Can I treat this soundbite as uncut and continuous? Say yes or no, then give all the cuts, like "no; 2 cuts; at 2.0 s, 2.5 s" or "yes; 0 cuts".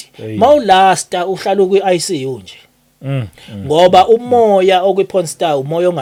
yes; 0 cuts